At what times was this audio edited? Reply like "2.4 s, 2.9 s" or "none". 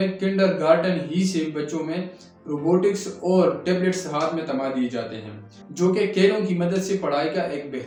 none